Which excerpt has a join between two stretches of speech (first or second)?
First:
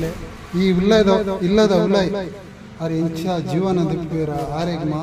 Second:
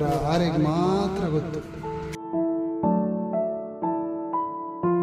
second